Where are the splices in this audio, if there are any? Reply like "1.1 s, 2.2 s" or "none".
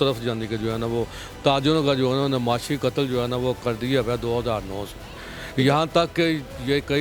none

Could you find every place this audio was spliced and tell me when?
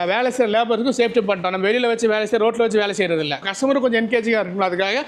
3.5 s

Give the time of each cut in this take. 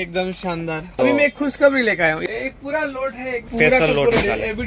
0.9 s, 2.2 s, 3.5 s

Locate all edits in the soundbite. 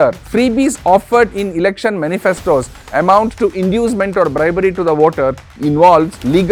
none

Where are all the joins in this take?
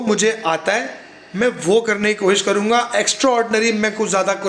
none

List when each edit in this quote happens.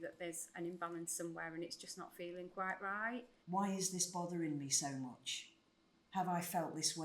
3.3 s

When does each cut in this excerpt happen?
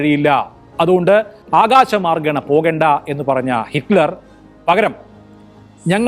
1.4 s

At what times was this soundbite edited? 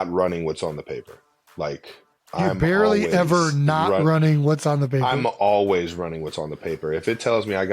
none

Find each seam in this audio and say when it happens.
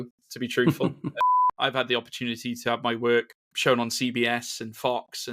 1.2 s, 3.4 s

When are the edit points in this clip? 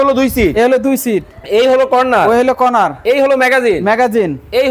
none

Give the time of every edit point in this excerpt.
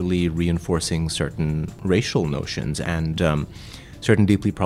1.7 s, 2.8 s

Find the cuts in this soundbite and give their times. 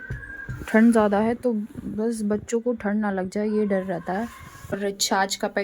4.7 s

